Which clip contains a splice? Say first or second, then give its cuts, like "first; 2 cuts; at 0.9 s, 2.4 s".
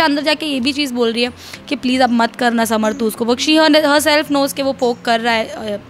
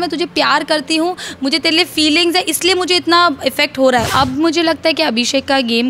second; 1 cut; at 4.1 s